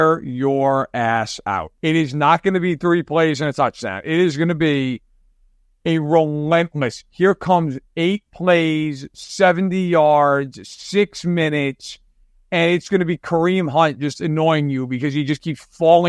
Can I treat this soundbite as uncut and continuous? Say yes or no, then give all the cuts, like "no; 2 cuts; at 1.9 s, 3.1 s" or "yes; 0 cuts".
no; 1 cut; at 1.7 s